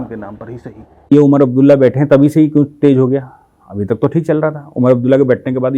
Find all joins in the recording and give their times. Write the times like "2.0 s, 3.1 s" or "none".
1.1 s